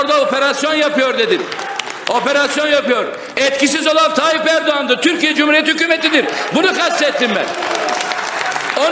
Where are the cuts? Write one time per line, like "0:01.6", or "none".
none